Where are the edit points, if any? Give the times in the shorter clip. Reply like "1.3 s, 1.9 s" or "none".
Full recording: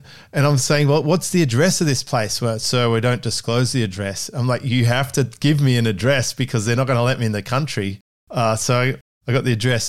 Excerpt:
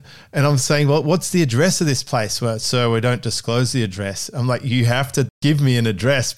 none